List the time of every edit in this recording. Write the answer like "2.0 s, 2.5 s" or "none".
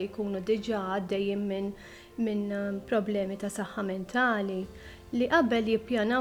none